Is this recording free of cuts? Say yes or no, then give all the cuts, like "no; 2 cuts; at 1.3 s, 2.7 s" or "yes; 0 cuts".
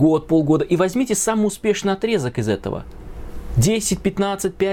yes; 0 cuts